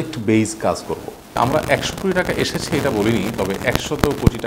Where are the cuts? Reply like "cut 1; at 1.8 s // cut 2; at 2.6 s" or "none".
cut 1; at 1.4 s